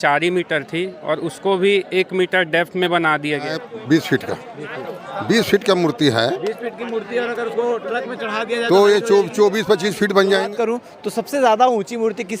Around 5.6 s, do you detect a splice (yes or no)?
no